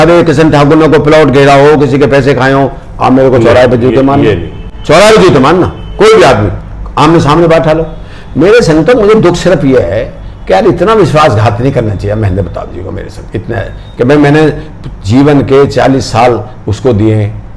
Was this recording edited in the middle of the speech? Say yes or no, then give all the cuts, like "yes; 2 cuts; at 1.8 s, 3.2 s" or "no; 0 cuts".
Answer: no; 0 cuts